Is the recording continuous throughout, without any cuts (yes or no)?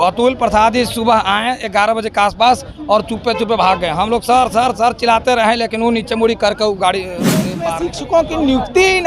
no